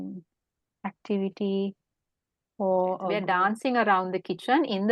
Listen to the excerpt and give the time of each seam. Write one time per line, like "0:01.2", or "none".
0:03.2